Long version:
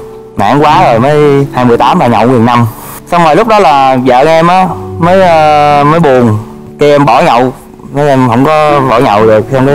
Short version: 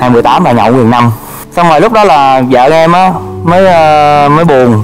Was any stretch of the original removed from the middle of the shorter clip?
no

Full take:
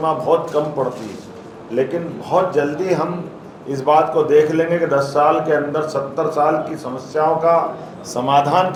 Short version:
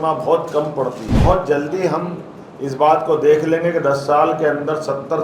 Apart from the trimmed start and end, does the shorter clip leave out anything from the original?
yes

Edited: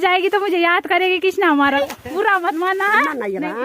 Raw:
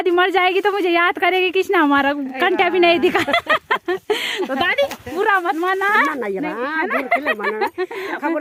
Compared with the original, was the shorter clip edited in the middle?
yes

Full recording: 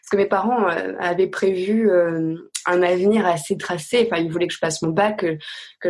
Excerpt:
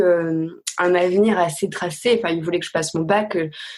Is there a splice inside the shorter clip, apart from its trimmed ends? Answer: no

